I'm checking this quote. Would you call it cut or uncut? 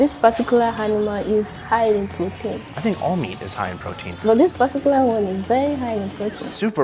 cut